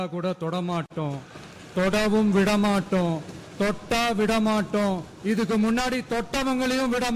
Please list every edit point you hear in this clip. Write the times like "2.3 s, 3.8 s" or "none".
none